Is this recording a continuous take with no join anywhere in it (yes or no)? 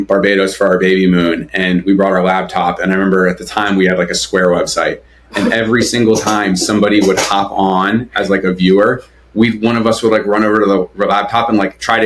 yes